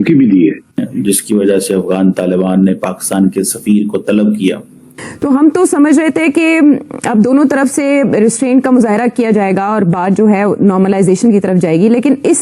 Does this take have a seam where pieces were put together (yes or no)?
yes